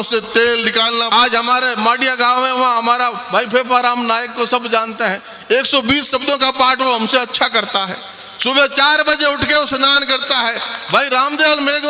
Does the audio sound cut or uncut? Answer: cut